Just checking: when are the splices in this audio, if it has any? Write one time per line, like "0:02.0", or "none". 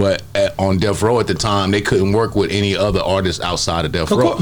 none